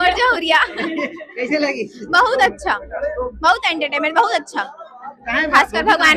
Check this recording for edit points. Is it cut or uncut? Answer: uncut